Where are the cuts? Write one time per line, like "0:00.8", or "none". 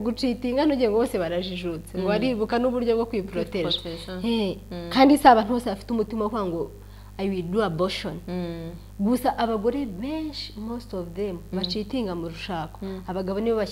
none